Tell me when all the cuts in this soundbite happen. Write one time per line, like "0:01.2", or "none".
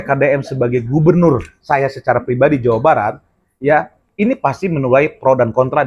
none